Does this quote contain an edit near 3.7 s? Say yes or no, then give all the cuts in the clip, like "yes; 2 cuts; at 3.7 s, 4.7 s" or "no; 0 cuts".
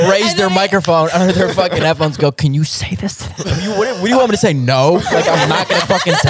yes; 1 cut; at 3.7 s